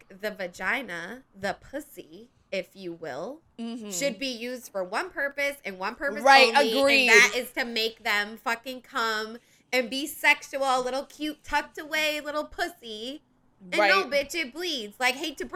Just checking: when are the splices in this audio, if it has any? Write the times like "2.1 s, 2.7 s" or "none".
none